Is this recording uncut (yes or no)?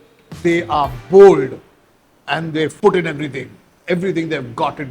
no